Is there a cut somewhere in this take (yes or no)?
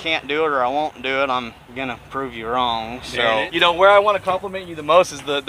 yes